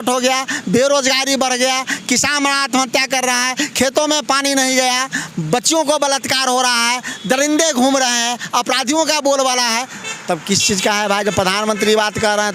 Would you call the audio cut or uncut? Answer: uncut